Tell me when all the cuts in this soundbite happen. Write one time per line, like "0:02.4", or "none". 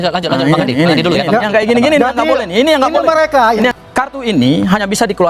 0:03.7